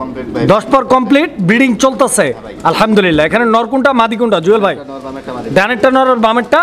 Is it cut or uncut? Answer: uncut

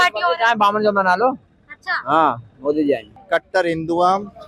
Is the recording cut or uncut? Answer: cut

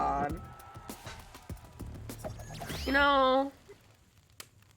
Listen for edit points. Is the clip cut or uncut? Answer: cut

